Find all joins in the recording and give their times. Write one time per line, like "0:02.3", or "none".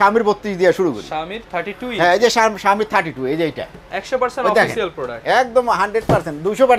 none